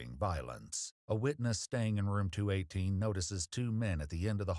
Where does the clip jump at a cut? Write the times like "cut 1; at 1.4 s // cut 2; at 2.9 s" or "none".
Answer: none